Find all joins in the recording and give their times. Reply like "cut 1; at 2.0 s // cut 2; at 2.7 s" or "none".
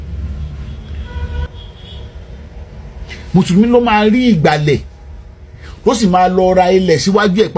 cut 1; at 1.4 s